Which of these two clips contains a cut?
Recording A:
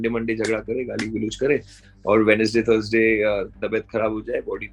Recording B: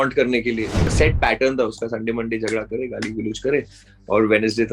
B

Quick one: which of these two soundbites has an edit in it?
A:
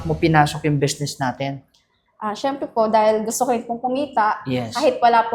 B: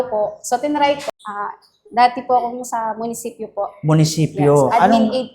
B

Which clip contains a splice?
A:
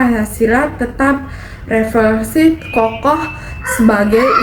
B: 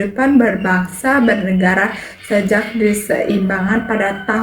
B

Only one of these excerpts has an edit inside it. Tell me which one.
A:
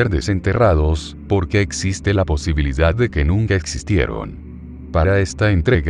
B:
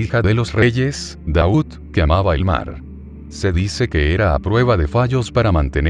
A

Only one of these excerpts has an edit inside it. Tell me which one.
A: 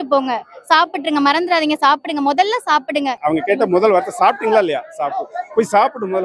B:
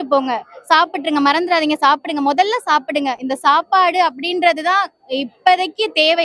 A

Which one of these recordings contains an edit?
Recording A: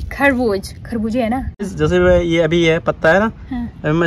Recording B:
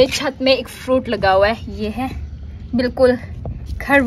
A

